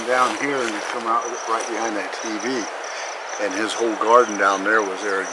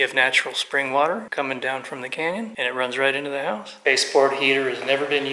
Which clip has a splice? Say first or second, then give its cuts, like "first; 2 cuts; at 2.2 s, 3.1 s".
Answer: second; 3 cuts; at 1.3 s, 2.5 s, 3.7 s